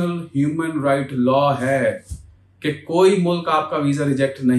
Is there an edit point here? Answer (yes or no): no